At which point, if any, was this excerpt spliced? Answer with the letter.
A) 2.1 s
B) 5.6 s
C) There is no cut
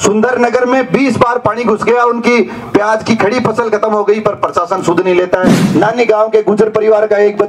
B